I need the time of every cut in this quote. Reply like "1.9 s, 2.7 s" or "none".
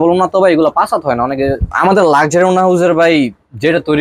1.7 s